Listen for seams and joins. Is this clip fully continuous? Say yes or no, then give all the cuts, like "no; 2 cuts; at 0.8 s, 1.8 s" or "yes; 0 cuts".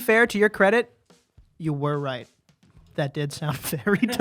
yes; 0 cuts